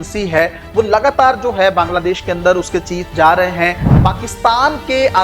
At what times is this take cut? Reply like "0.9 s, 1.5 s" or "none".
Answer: 3.9 s